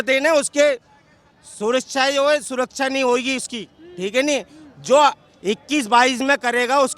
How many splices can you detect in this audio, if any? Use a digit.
0